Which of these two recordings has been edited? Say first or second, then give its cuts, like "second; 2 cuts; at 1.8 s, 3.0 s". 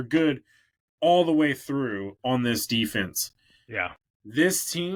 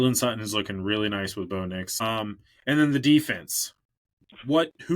second; 1 cut; at 2.0 s